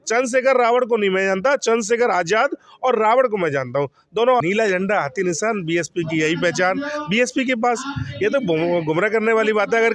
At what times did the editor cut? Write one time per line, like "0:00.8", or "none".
0:04.4